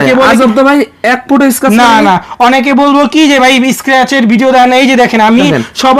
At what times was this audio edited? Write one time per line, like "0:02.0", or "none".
none